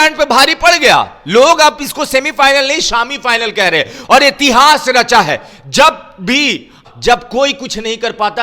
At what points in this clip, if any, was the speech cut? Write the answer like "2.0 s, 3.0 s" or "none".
6.8 s

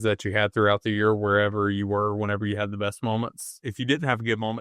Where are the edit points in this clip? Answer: 3.7 s

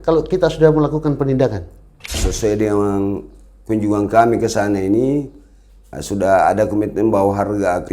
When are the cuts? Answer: 2.3 s

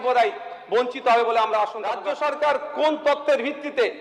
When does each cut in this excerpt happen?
2.0 s

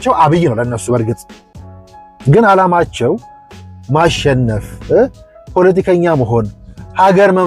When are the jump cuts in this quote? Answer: none

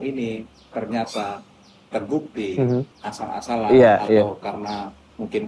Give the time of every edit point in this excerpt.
3.0 s

